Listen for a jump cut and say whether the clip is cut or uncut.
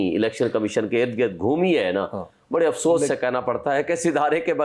uncut